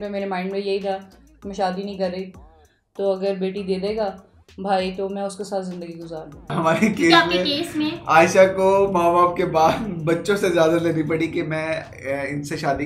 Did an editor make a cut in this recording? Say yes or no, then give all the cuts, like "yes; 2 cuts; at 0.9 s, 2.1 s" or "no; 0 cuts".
yes; 1 cut; at 6.5 s